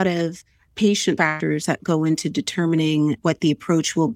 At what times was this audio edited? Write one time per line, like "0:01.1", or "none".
0:01.2